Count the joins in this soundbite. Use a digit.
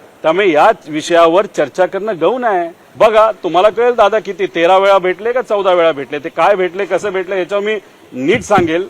1